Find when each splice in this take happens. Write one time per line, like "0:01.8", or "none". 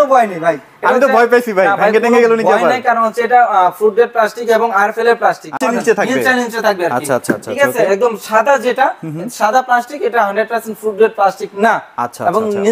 0:05.6